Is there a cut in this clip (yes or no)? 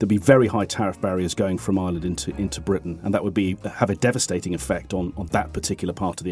no